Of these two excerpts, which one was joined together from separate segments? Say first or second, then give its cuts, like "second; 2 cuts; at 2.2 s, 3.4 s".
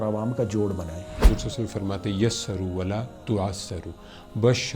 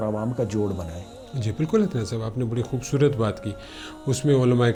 first; 1 cut; at 1.2 s